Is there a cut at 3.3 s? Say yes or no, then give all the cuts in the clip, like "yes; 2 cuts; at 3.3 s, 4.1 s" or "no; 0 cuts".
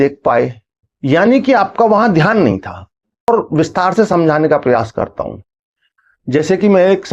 yes; 1 cut; at 3.3 s